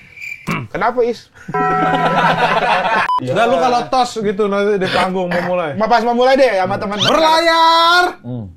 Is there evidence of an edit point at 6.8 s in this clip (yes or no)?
no